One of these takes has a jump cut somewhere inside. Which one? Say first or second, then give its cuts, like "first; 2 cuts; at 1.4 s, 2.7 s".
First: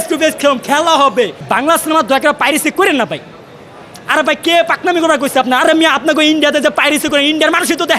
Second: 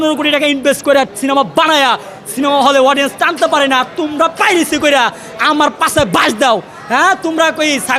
first; 1 cut; at 1.4 s